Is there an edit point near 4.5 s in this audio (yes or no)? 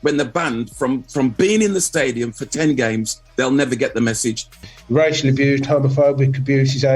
yes